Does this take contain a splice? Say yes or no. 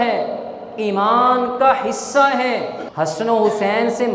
yes